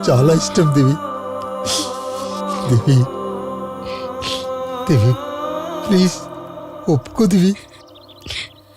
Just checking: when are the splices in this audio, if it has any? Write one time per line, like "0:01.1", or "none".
none